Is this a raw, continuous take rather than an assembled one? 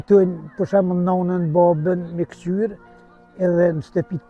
yes; 0 cuts

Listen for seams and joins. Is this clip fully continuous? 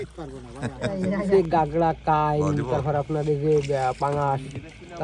no; 1 cut; at 1.3 s

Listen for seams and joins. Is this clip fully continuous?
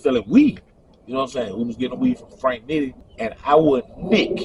no; 1 cut; at 3.0 s

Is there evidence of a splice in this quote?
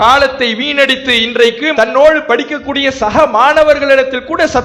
no; 0 cuts

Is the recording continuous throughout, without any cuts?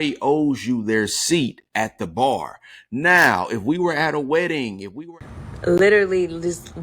no; 1 cut; at 4.9 s

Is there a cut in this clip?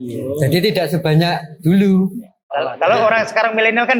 no; 0 cuts

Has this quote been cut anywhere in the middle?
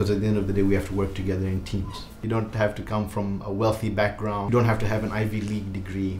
yes; 1 cut; at 2.2 s

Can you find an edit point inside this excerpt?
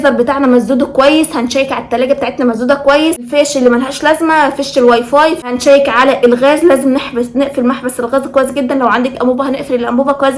yes; 2 cuts; at 3.3 s, 5.5 s

